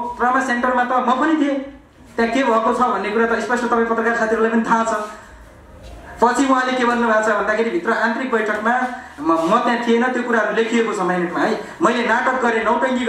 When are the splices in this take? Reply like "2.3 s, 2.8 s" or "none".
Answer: none